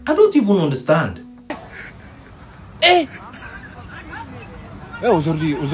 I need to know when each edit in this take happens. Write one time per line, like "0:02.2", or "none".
0:01.5